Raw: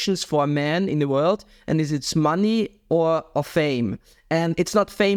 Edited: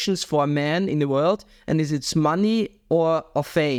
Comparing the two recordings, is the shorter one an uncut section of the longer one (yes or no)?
yes